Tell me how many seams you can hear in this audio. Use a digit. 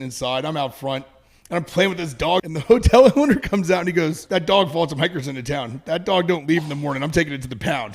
2